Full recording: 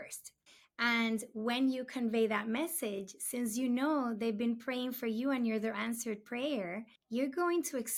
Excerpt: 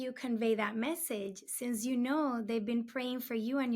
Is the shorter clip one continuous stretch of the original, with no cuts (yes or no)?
yes